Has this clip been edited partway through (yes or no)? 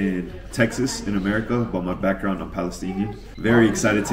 no